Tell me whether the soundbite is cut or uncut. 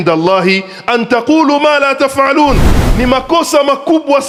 uncut